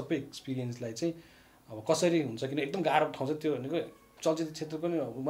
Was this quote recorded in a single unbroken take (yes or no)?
yes